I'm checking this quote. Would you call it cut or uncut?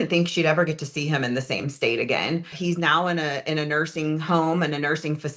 cut